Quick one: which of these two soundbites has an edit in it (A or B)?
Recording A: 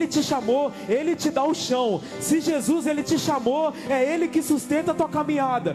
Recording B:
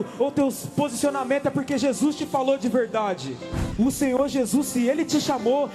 B